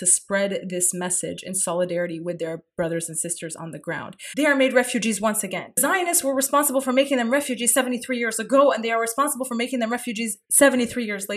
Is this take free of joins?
no; 3 cuts; at 4.1 s, 5.8 s, 10.4 s

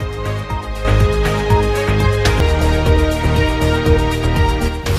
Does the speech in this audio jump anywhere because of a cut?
yes; 1 cut; at 2.4 s

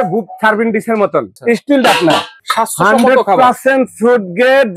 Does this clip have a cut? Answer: yes; 2 cuts; at 1.3 s, 2.4 s

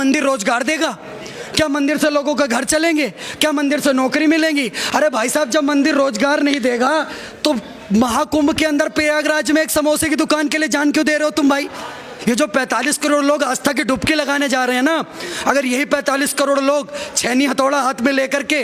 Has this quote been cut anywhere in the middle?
yes; 1 cut; at 12.1 s

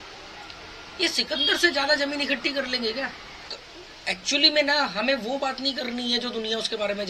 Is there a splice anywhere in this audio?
yes; 1 cut; at 3.5 s

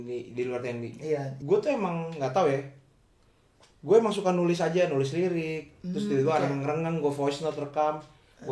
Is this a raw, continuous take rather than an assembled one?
no; 1 cut; at 1.3 s

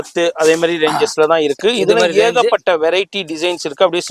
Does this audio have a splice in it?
no; 0 cuts

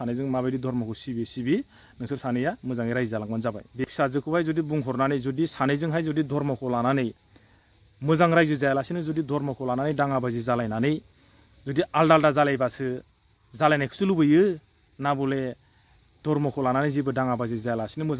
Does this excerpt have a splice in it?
yes; 1 cut; at 3.8 s

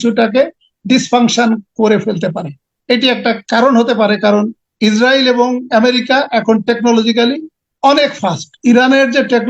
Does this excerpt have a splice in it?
yes; 1 cut; at 8.5 s

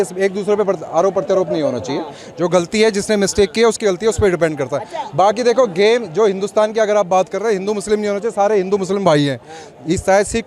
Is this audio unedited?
yes; 0 cuts

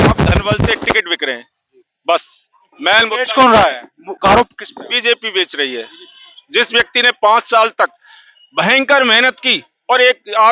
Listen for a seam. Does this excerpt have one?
no; 0 cuts

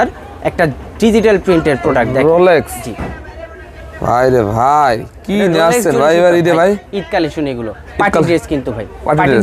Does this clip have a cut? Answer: no; 0 cuts

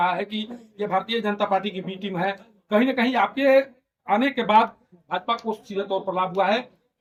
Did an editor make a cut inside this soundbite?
no; 0 cuts

